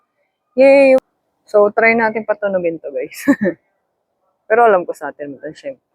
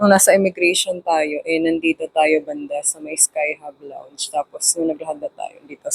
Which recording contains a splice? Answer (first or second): first